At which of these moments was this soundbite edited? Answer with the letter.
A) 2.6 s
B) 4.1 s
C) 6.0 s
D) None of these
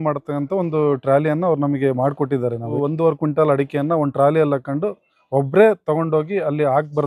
A